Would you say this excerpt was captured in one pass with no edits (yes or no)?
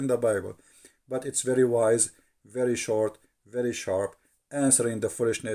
yes